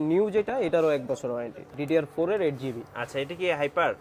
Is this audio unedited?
no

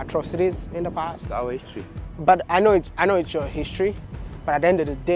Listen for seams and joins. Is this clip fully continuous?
no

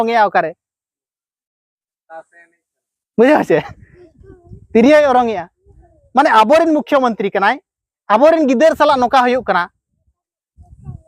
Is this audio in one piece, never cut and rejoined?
yes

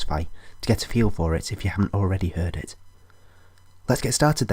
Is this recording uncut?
no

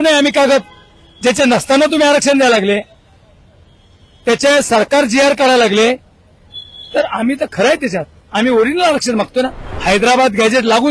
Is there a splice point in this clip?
yes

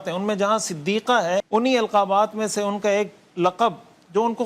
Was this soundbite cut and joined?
yes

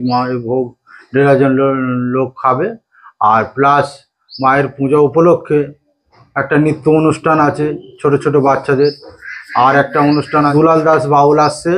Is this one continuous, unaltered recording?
no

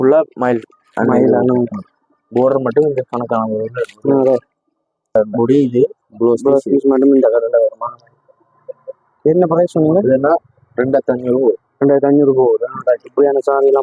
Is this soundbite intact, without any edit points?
no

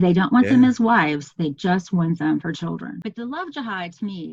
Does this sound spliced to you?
yes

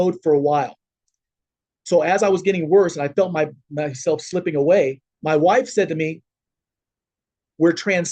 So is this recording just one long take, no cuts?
no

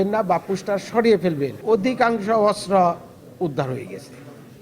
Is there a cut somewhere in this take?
yes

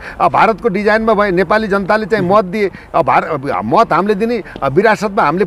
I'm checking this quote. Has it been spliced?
no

